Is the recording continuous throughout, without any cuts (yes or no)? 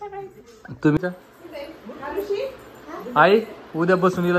no